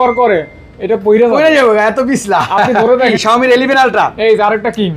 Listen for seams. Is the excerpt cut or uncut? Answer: cut